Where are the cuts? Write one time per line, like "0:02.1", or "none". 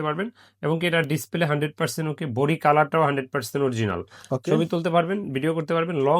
none